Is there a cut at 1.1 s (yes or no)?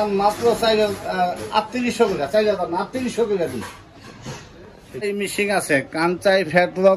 no